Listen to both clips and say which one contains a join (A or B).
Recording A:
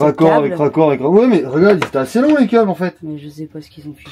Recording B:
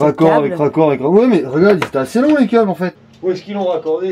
B